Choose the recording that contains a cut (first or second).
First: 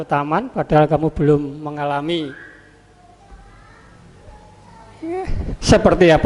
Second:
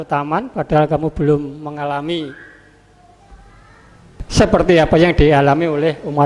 second